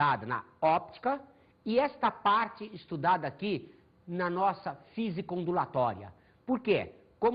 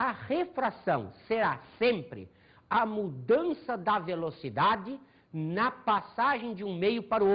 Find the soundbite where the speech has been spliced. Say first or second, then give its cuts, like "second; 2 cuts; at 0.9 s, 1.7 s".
second; 1 cut; at 2.3 s